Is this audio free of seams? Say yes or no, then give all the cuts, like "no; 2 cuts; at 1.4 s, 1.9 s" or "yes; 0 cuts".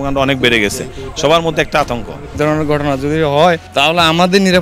no; 2 cuts; at 2.4 s, 3.7 s